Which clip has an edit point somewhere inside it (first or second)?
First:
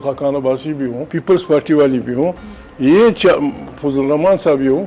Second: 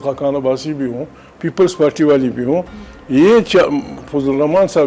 first